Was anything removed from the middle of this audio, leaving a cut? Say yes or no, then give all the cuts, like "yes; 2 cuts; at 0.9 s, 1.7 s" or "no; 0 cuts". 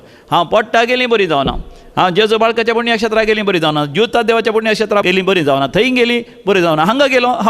yes; 1 cut; at 5.0 s